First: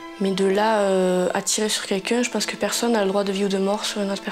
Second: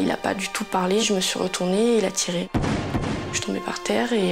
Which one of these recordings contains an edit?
second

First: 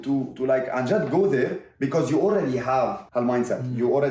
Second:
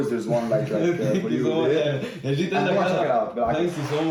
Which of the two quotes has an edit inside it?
first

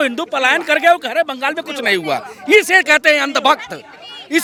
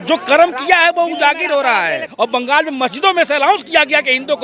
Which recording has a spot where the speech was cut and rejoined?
second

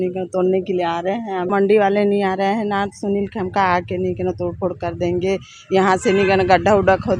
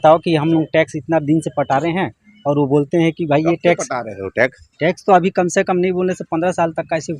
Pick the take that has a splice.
first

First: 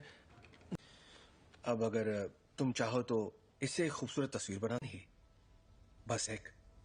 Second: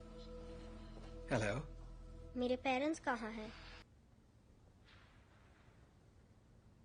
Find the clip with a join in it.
second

